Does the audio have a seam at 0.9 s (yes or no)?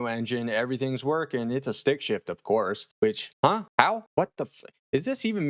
no